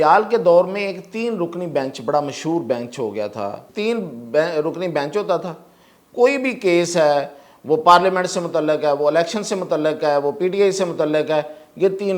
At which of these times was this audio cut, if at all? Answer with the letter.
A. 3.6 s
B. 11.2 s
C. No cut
A